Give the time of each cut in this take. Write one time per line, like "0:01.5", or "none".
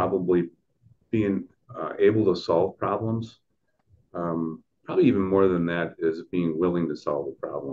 none